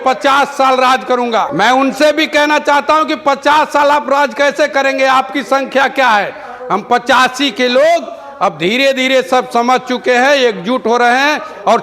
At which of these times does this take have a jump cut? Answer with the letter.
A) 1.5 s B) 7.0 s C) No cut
A